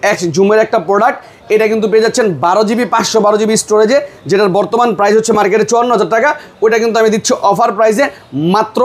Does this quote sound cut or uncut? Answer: uncut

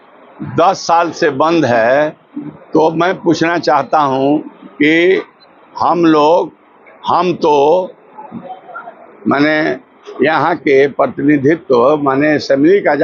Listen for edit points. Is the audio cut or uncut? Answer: uncut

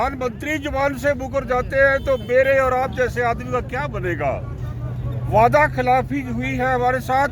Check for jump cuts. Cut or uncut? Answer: uncut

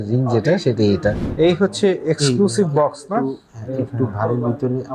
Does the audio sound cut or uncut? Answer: cut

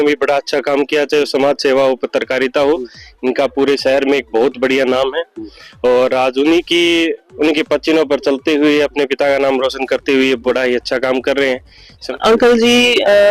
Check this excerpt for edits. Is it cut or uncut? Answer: cut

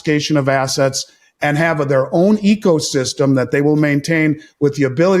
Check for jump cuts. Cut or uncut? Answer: uncut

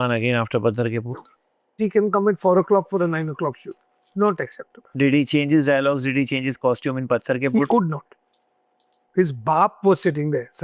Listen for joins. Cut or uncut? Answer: cut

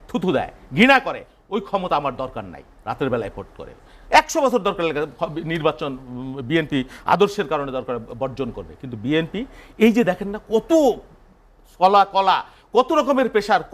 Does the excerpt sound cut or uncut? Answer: uncut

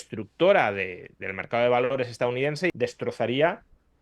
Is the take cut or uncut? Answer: cut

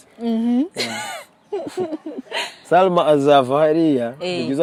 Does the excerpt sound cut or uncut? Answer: uncut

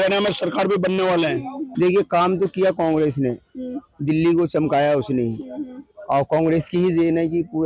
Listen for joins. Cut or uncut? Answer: cut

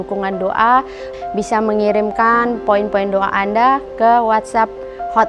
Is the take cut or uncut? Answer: uncut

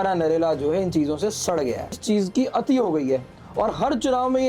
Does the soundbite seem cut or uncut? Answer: cut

